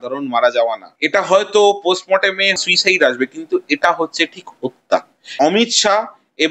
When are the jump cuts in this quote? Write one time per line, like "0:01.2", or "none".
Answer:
0:00.9
0:02.6
0:05.2